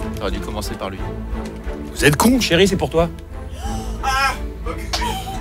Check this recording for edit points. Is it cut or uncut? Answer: uncut